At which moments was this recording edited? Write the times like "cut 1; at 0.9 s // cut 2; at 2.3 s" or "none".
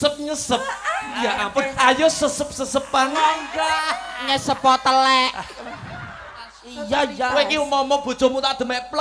cut 1; at 6.7 s